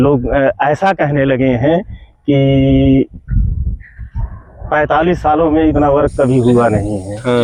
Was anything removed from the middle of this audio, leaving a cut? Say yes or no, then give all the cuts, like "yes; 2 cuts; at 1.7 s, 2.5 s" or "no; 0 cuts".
no; 0 cuts